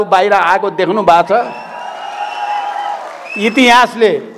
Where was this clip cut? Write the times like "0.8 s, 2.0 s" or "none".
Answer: none